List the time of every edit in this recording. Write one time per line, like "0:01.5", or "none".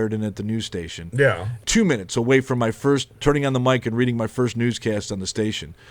0:01.6